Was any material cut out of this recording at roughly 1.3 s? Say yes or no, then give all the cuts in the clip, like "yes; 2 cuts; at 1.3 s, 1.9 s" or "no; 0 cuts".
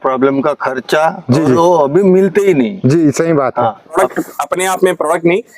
no; 1 cut; at 3.9 s